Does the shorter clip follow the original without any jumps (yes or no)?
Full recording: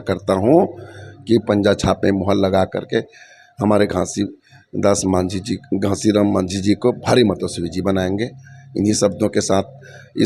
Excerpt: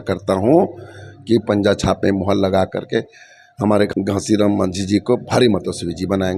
no